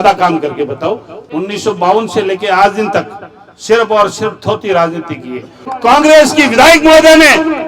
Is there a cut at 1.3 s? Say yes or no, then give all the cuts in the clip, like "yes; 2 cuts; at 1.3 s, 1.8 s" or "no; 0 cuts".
yes; 2 cuts; at 1.3 s, 5.7 s